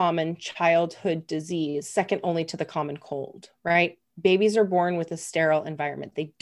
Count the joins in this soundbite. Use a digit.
0